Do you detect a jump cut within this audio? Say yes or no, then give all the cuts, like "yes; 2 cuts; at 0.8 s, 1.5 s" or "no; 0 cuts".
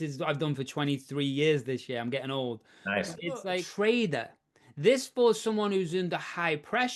yes; 1 cut; at 3.6 s